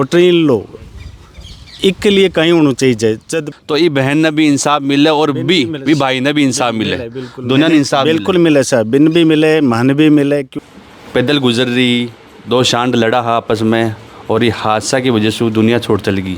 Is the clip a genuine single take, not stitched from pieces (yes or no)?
no